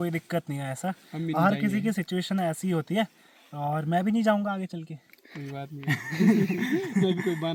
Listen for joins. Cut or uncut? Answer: uncut